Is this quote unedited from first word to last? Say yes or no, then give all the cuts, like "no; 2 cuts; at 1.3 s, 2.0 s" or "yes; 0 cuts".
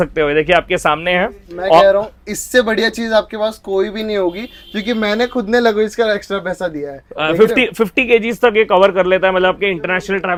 yes; 0 cuts